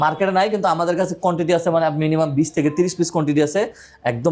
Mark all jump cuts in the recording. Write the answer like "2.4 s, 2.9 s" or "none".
none

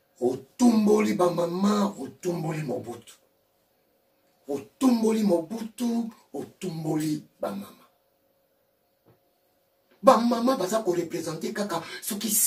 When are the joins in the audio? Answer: 8.8 s

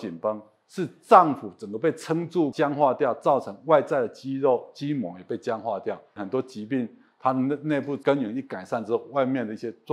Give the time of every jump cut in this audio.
2.5 s, 6.2 s, 8.0 s

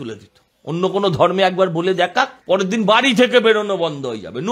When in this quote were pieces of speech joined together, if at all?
2.4 s

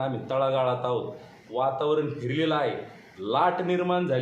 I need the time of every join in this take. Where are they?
1.3 s

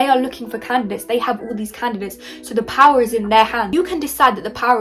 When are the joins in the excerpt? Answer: 3.7 s

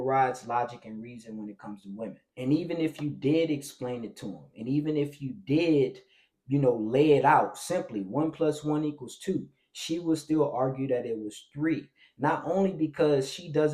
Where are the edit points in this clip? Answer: 2.2 s

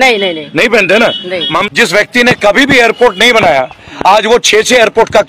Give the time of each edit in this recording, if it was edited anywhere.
1.7 s

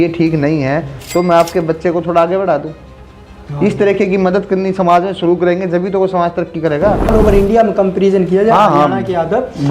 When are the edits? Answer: 7.1 s

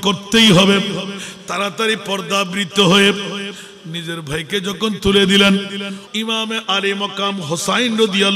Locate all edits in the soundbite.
6.0 s

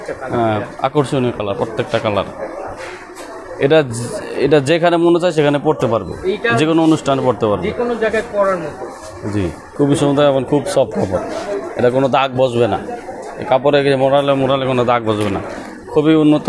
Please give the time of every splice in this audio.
9.6 s

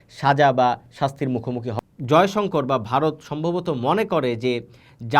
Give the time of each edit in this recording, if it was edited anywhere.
1.7 s

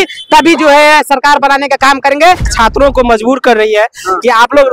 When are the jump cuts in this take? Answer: 2.5 s

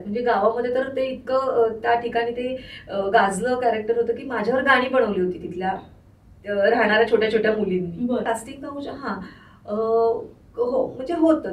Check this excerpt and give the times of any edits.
8.2 s

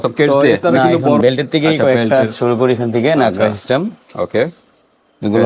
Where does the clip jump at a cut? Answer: none

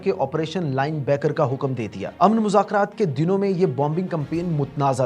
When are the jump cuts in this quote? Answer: none

